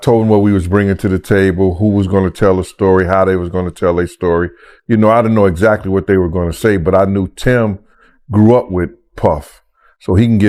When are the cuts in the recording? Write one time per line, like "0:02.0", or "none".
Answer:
none

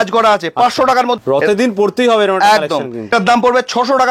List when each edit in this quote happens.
0:01.2
0:03.0

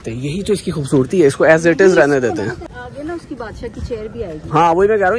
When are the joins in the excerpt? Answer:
0:02.5

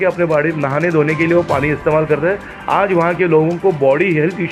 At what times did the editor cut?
none

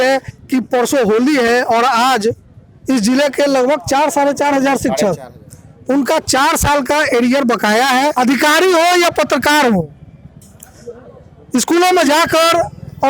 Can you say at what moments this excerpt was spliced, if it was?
0:08.1

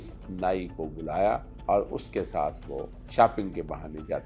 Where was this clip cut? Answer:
0:01.5
0:03.0

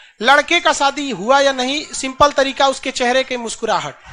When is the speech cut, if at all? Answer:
none

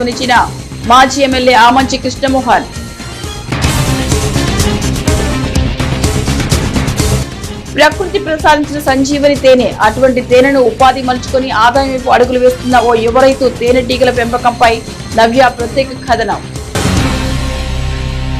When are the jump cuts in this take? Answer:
0:16.6

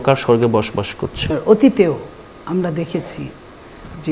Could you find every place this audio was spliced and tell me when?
0:01.3

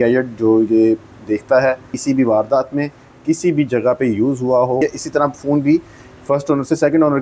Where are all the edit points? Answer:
0:01.9
0:04.8

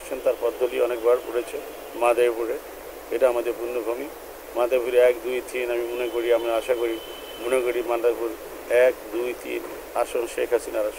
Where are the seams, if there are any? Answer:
none

